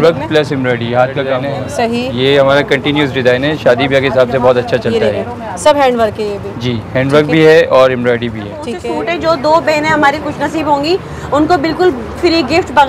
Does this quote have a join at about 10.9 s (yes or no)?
no